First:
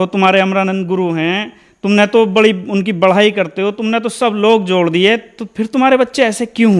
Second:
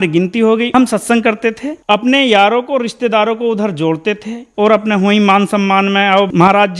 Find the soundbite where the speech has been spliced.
second; 3 cuts; at 0.7 s, 1.8 s, 4.4 s

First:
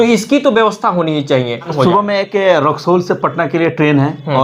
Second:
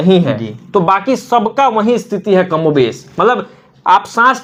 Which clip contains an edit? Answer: first; 1 cut; at 1.7 s

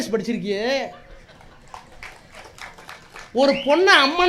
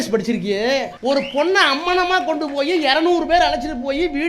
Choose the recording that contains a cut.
second; 1 cut; at 0.9 s

